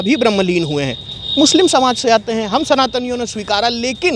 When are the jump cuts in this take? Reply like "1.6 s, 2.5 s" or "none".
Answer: none